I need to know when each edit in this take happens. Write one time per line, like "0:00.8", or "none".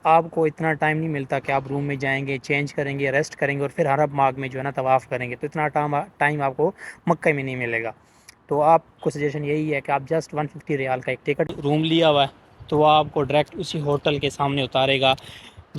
0:11.5